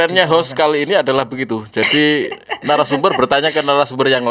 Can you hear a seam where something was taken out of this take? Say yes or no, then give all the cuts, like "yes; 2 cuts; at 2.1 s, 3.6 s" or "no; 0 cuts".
no; 0 cuts